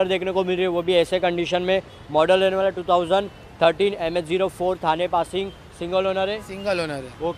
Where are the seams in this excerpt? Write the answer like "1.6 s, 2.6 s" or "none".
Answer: none